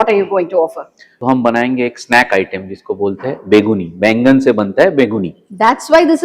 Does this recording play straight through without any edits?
no; 1 cut; at 1.0 s

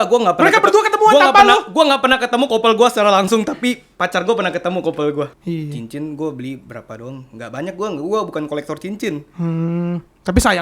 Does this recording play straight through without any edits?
no; 1 cut; at 5.3 s

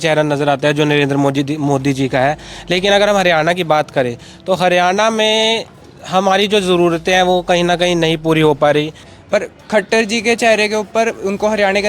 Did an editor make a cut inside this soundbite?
yes; 1 cut; at 9.1 s

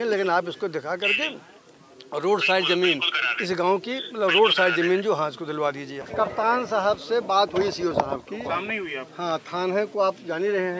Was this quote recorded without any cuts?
no; 1 cut; at 6.1 s

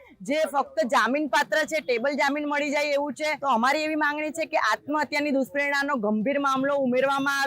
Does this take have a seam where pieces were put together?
yes; 1 cut; at 3.4 s

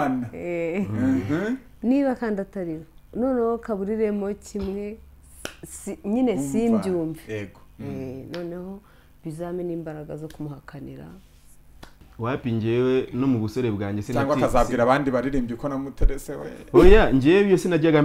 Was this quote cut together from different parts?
yes; 1 cut; at 12.1 s

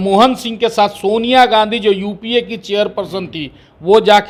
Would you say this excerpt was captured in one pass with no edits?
yes; 0 cuts

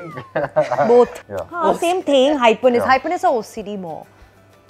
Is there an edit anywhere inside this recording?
yes; 1 cut; at 1.3 s

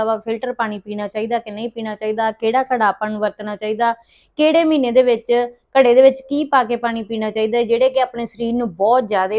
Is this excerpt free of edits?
yes; 0 cuts

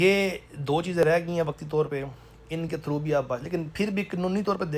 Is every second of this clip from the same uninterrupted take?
yes; 0 cuts

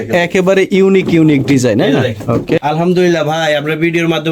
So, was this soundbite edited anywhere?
no; 0 cuts

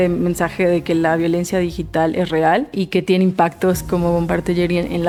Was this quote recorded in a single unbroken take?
yes; 0 cuts

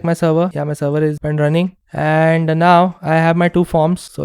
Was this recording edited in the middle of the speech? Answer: yes; 1 cut; at 0.9 s

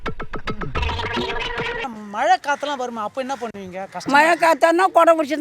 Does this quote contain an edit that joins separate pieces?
yes; 1 cut; at 1.8 s

